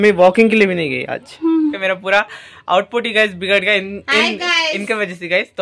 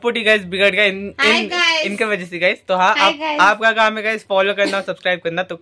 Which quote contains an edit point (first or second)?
first